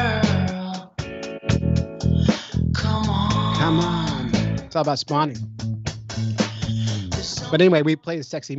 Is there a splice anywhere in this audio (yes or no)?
no